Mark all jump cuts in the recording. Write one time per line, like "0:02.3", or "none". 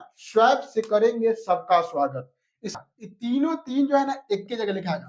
0:02.7